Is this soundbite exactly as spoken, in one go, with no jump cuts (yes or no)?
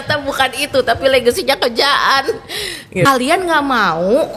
yes